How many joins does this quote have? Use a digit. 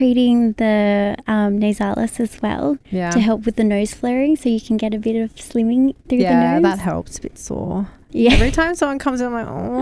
0